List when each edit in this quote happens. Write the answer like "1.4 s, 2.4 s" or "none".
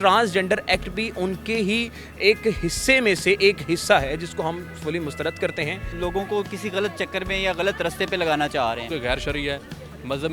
5.9 s, 8.8 s